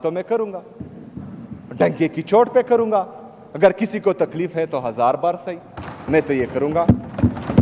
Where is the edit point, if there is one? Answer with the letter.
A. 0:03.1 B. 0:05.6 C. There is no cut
C